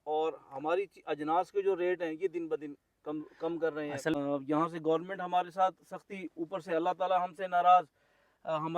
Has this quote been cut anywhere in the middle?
yes; 1 cut; at 4.1 s

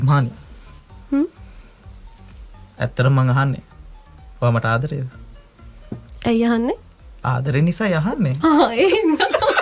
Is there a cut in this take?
no; 0 cuts

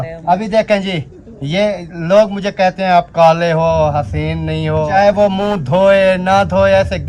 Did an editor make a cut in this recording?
yes; 1 cut; at 4.9 s

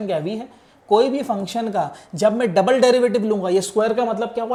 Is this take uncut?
yes; 0 cuts

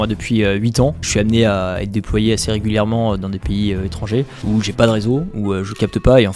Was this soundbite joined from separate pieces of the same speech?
yes; 1 cut; at 1.1 s

